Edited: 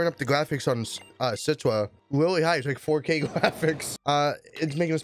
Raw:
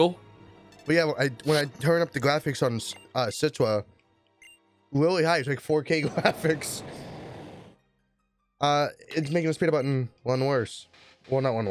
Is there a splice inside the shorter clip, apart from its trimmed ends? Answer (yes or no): yes